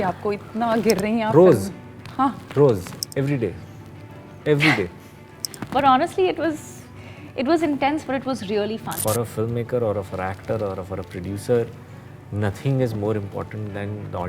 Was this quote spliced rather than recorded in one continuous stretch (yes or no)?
yes